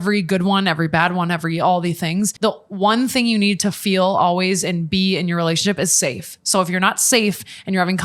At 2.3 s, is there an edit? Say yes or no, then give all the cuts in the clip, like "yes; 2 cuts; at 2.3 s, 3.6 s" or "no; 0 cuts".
yes; 1 cut; at 2.3 s